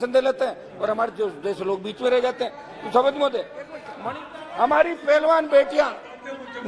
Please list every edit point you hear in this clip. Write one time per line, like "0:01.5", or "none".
0:03.8